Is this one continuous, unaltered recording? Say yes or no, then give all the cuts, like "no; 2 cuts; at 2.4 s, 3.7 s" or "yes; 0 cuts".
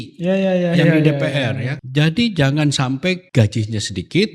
no; 2 cuts; at 1.7 s, 3.2 s